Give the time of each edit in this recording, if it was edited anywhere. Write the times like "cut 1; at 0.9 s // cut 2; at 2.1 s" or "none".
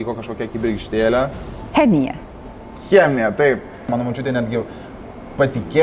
cut 1; at 3.9 s